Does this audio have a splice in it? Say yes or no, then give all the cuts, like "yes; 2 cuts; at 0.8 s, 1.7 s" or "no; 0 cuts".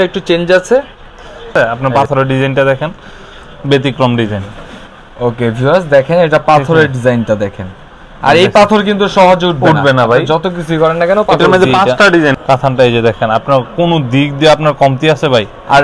yes; 2 cuts; at 1.5 s, 12.4 s